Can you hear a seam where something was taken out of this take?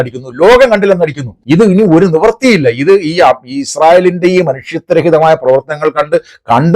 yes; 1 cut; at 1.3 s

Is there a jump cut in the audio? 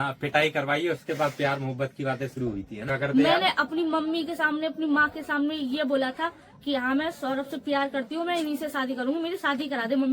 yes; 1 cut; at 2.8 s

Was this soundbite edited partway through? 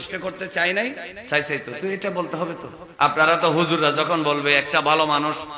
yes; 2 cuts; at 1.1 s, 2.8 s

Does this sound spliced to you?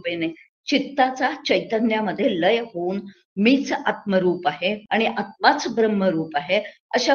yes; 1 cut; at 4.8 s

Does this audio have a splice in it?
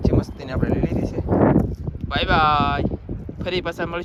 no; 0 cuts

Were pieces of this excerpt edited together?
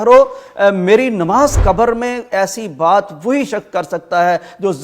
yes; 1 cut; at 1.6 s

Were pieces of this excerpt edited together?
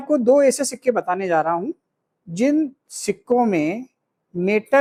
no; 0 cuts

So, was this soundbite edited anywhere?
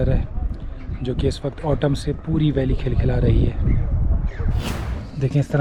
yes; 1 cut; at 4.6 s

